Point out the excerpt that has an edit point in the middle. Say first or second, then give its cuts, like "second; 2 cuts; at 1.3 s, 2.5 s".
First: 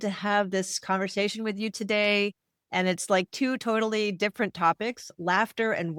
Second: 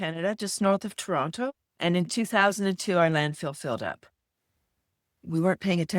second; 1 cut; at 1.7 s